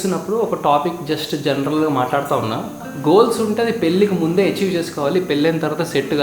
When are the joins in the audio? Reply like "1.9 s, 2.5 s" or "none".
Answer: 2.9 s